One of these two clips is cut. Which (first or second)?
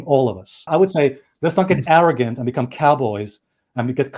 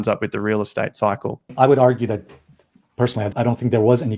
second